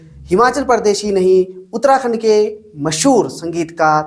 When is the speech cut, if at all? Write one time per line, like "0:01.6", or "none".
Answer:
none